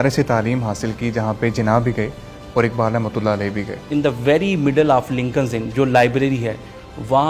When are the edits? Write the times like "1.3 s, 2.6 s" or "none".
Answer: 3.9 s